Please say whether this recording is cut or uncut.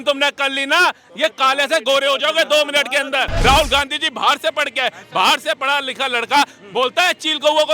cut